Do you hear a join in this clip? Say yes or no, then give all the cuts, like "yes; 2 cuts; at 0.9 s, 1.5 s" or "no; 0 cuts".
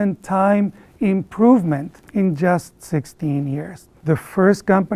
yes; 1 cut; at 3.9 s